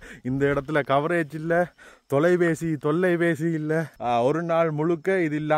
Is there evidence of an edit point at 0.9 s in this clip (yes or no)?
no